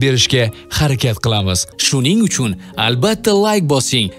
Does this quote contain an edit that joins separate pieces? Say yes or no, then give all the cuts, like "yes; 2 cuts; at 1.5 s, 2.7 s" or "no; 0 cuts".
yes; 1 cut; at 1.7 s